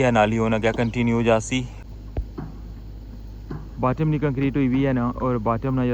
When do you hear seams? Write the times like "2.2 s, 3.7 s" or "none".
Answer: 1.8 s